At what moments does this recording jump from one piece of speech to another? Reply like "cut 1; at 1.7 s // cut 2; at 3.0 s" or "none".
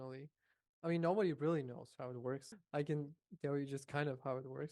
cut 1; at 2.5 s